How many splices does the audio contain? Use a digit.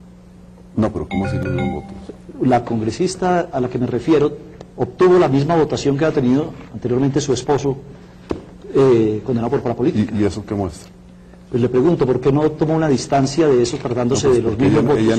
0